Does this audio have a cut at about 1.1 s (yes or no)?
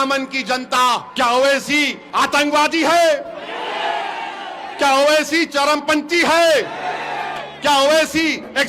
yes